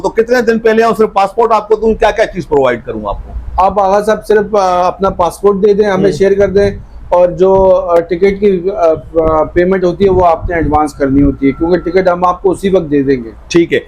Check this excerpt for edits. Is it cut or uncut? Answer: uncut